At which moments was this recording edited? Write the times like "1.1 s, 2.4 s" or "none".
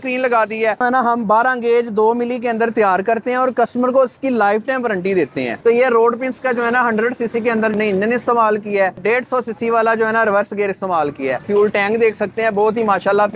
0.8 s, 5.6 s, 8.9 s, 11.5 s